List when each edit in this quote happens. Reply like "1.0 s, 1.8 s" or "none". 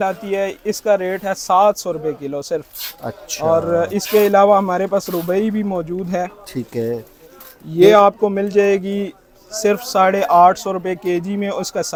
none